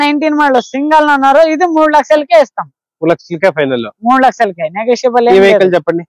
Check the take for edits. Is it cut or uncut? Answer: uncut